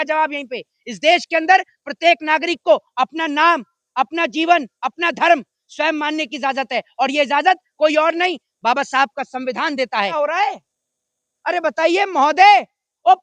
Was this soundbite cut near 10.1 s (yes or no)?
yes